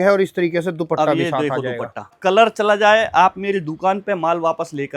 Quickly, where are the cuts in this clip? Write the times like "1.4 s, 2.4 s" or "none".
2.2 s